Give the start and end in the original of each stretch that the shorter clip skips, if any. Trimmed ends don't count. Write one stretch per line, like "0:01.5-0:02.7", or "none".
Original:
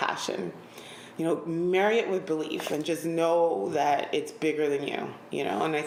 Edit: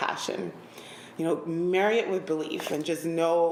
none